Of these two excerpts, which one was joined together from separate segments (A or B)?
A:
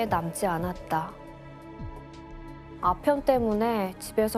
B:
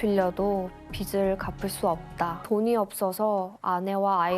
B